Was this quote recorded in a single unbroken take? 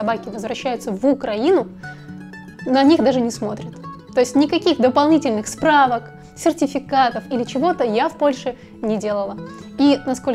yes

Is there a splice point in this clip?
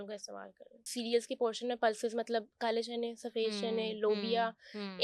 yes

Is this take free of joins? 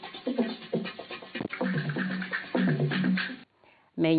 yes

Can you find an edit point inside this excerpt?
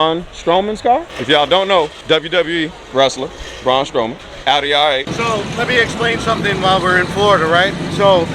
yes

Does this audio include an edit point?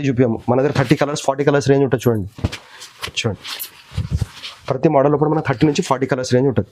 no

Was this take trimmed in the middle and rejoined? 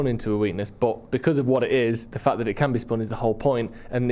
no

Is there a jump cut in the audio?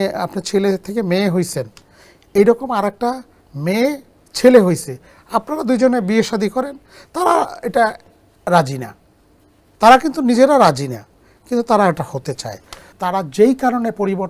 yes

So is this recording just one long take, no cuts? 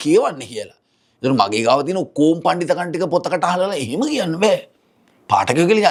yes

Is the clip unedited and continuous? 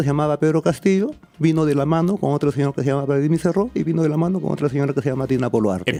yes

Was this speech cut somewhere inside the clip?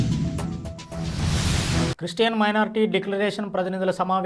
no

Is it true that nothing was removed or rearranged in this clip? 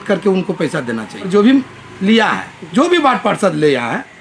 no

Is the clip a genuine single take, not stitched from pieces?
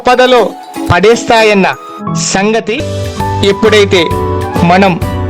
no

